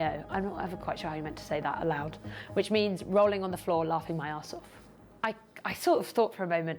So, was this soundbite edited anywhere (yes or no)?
no